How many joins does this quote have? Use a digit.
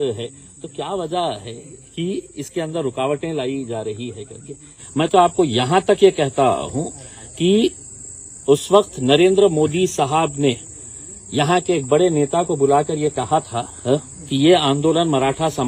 1